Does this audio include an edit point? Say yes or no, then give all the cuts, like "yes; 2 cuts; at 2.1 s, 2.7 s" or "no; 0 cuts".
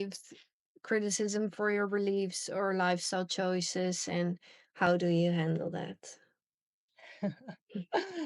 no; 0 cuts